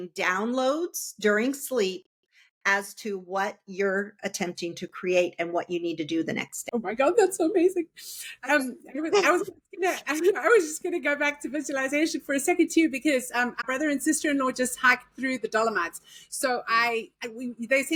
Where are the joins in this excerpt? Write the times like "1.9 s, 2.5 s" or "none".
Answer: none